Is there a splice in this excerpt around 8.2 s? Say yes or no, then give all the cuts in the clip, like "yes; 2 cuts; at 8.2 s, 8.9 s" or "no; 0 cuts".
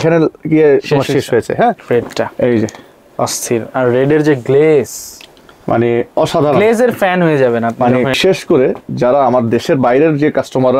yes; 2 cuts; at 1.8 s, 8.2 s